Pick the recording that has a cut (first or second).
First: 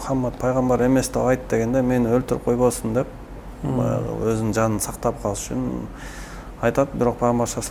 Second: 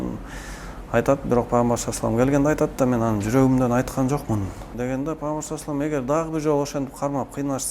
second